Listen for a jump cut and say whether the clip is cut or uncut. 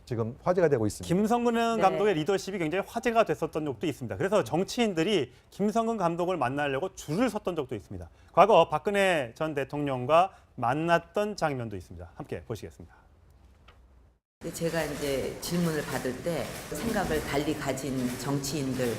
cut